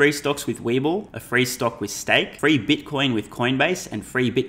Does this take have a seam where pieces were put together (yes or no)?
yes